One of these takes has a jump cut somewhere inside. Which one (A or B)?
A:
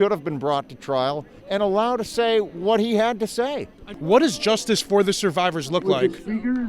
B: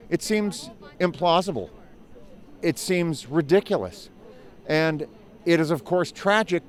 A